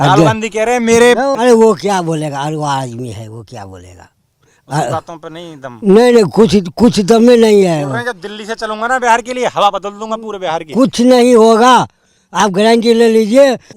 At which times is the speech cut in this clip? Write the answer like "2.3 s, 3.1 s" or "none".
1.3 s